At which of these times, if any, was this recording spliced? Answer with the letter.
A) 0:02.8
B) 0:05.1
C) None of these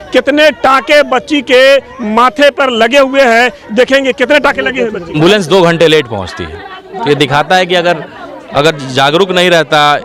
B